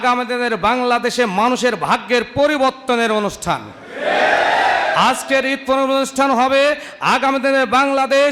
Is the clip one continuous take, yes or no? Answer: yes